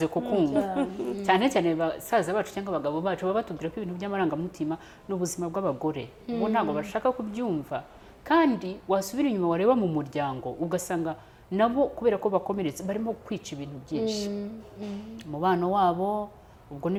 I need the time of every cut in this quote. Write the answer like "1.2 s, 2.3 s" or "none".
none